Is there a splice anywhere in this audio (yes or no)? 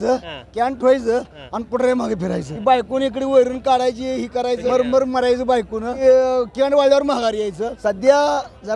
yes